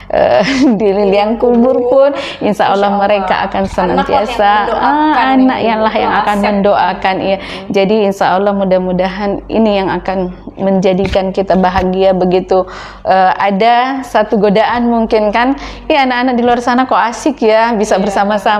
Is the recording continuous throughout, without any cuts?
yes; 0 cuts

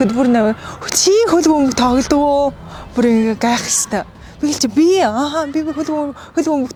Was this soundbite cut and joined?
no; 0 cuts

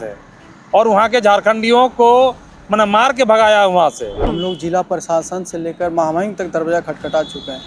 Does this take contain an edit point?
yes; 1 cut; at 4.3 s

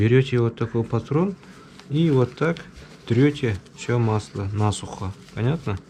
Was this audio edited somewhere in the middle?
no; 0 cuts

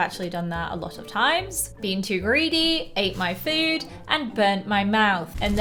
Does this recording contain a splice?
no; 0 cuts

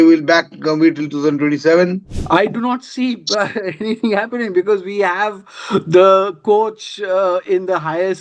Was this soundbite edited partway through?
yes; 1 cut; at 2.1 s

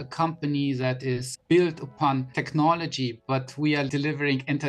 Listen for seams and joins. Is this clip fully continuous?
no; 3 cuts; at 1.3 s, 2.4 s, 3.9 s

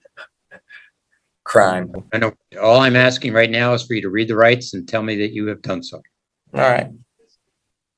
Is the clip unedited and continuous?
yes; 0 cuts

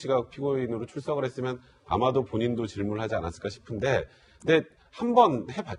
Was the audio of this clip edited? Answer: no; 0 cuts

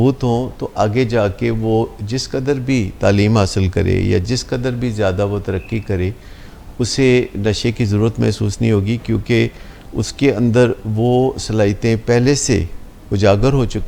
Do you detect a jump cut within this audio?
no; 0 cuts

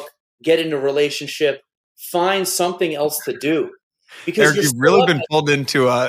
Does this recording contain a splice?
no; 0 cuts

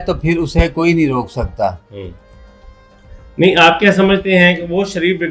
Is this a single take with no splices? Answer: yes; 0 cuts

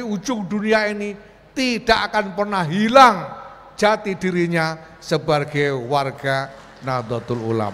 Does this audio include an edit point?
no; 0 cuts

